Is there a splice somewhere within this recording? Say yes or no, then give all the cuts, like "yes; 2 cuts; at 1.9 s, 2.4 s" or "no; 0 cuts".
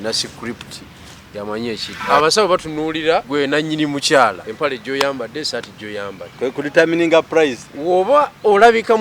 yes; 3 cuts; at 1.9 s, 3.3 s, 4.5 s